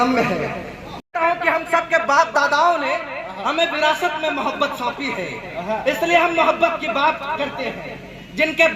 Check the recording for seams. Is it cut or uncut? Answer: cut